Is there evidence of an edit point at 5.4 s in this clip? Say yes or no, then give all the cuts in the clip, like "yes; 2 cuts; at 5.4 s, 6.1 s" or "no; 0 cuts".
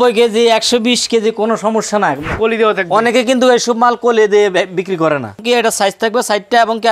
yes; 2 cuts; at 2.3 s, 5.4 s